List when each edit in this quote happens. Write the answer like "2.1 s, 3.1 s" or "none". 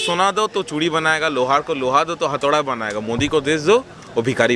none